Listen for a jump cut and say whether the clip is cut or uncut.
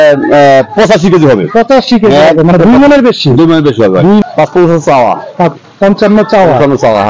cut